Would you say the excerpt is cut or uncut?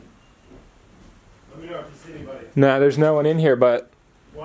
uncut